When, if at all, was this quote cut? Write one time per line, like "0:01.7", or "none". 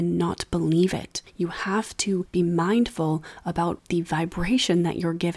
0:03.8